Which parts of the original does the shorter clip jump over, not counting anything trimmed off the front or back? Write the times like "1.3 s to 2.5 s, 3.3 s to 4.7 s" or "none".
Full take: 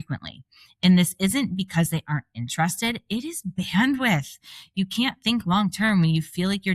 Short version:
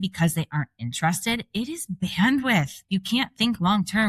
4.3 s to 4.6 s